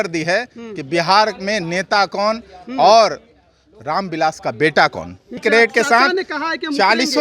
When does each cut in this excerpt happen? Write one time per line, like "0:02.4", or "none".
0:05.4